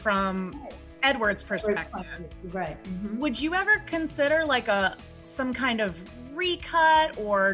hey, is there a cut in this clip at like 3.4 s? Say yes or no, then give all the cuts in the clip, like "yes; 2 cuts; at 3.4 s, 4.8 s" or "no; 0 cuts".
no; 0 cuts